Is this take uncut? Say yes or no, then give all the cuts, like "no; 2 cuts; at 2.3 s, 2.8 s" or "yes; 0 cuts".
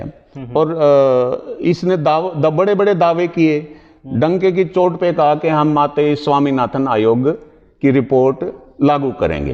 yes; 0 cuts